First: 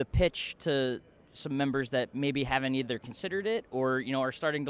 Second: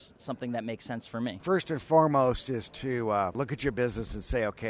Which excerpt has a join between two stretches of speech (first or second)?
second